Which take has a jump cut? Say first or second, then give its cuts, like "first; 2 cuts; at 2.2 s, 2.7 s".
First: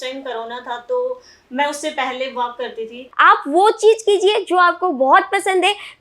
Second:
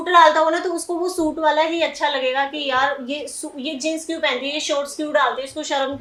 first; 1 cut; at 3.1 s